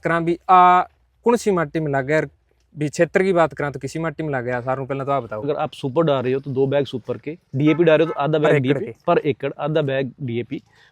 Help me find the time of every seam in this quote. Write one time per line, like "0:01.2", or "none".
0:05.4